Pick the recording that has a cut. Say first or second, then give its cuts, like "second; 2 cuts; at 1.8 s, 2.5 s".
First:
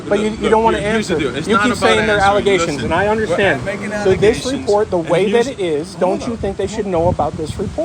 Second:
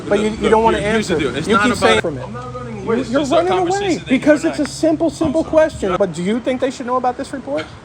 second; 2 cuts; at 2.0 s, 5.9 s